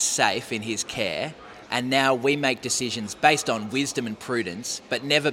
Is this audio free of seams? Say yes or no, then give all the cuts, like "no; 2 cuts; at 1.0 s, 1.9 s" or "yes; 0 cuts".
yes; 0 cuts